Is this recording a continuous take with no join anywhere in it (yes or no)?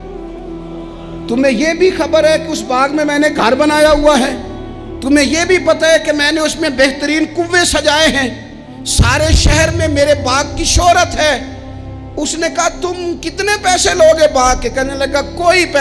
yes